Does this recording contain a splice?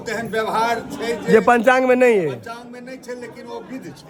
no; 0 cuts

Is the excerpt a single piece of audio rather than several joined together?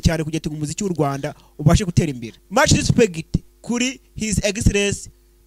no; 1 cut; at 2.3 s

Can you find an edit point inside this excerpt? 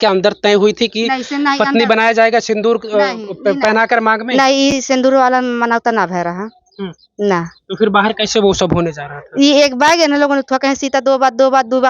no; 0 cuts

